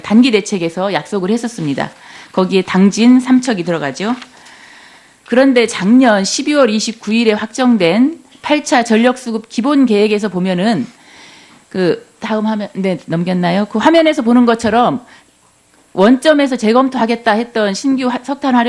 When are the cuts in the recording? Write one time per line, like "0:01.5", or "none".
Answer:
0:15.3